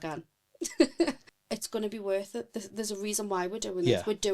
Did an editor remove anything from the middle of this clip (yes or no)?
yes